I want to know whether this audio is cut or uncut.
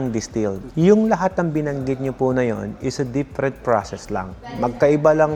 uncut